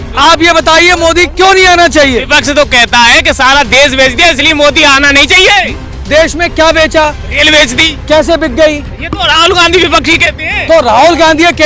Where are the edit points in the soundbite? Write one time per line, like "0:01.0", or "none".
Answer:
none